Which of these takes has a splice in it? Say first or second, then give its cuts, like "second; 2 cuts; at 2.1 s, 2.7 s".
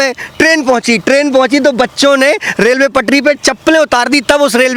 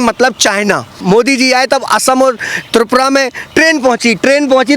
second; 1 cut; at 0.9 s